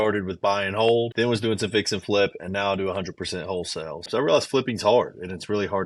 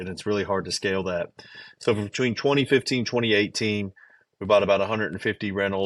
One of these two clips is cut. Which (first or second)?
first